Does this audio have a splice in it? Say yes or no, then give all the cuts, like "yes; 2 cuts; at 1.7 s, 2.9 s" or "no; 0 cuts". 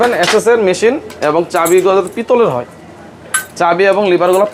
no; 0 cuts